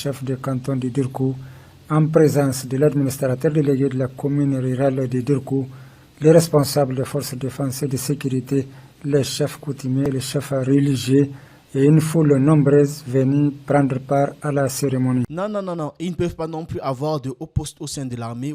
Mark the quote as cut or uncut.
cut